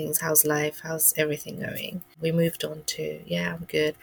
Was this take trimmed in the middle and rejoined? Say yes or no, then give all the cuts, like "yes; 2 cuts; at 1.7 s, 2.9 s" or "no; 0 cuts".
yes; 1 cut; at 2.1 s